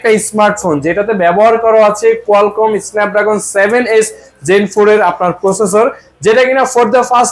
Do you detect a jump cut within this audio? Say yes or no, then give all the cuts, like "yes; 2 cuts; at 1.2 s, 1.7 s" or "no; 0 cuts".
no; 0 cuts